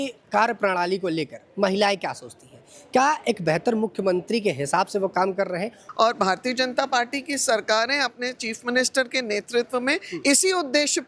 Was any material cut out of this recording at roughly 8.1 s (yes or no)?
no